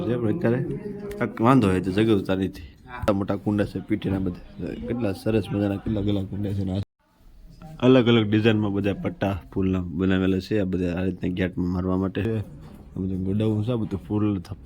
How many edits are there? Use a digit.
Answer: 3